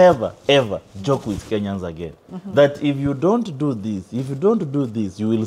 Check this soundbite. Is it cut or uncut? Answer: uncut